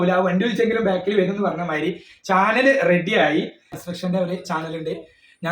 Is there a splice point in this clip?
yes; 1 cut; at 3.7 s

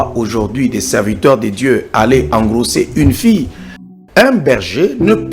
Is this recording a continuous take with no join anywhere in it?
no; 1 cut; at 3.9 s

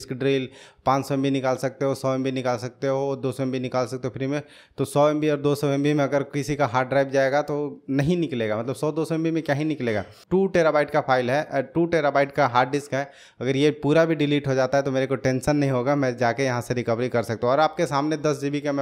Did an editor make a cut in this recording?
yes; 1 cut; at 10.1 s

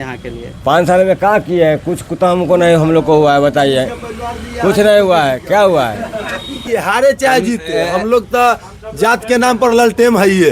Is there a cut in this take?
yes; 1 cut; at 6.5 s

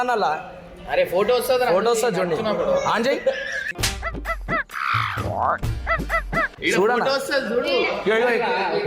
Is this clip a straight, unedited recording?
yes; 0 cuts

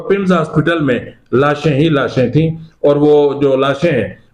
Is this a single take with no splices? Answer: yes; 0 cuts

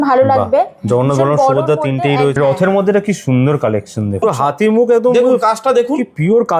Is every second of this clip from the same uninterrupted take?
no; 2 cuts; at 2.4 s, 4.2 s

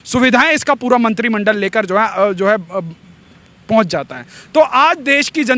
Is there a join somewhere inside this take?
no; 0 cuts

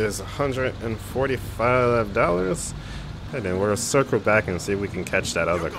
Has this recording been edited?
yes; 1 cut; at 3.2 s

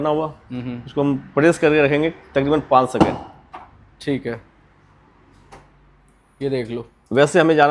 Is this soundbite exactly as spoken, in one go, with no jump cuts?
yes; 0 cuts

